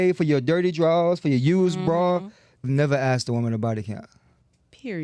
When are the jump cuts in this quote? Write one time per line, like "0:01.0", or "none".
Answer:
0:02.7